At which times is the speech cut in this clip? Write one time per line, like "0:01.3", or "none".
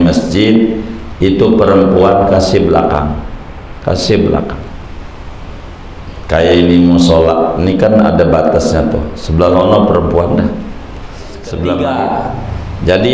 0:11.8